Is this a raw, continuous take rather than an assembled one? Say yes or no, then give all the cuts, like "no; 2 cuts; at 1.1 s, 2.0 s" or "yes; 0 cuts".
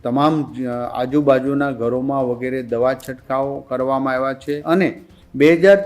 no; 1 cut; at 4.6 s